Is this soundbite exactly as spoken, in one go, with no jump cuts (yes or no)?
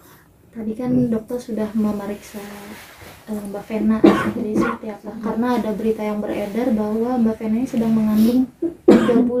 yes